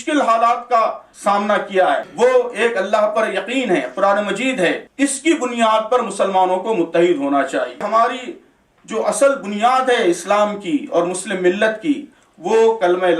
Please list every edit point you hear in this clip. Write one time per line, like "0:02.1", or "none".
0:01.1
0:02.1
0:04.9
0:07.8

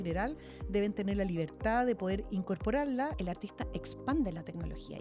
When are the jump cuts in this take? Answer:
0:03.1

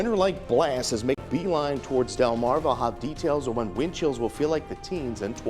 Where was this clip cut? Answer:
0:01.2

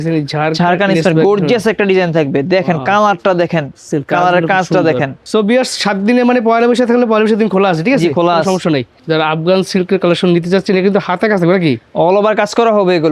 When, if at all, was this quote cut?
0:05.2
0:08.9

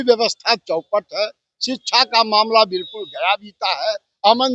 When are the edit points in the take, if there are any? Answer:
none

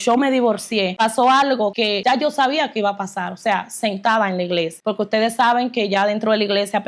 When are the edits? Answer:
0:00.9
0:01.8
0:04.8

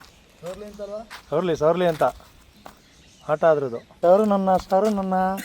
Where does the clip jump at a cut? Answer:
0:03.8

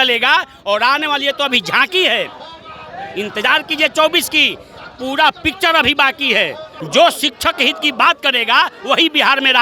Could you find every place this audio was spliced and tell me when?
0:06.7

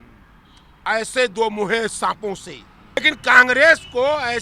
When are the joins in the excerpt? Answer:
0:03.0

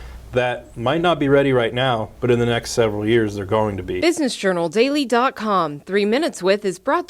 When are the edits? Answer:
0:03.9

